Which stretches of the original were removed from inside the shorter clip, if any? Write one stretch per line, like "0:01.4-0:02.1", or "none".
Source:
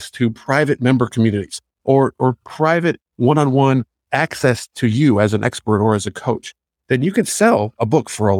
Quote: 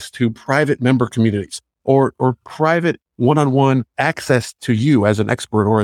0:03.9-0:04.1